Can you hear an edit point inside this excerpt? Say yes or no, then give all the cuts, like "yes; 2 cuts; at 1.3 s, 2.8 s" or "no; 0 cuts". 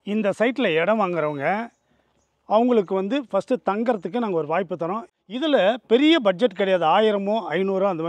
yes; 1 cut; at 5.1 s